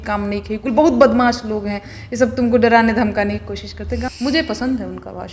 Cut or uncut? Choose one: cut